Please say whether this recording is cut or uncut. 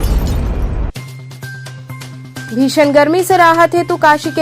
cut